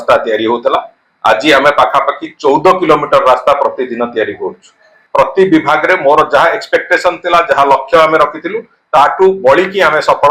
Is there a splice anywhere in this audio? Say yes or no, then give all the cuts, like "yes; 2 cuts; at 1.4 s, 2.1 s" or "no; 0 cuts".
yes; 1 cut; at 5.0 s